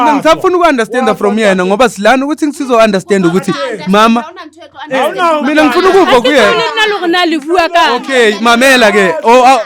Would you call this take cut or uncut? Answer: uncut